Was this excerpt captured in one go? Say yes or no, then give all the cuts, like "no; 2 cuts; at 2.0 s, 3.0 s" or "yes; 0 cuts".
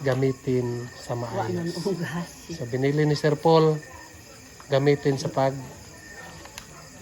yes; 0 cuts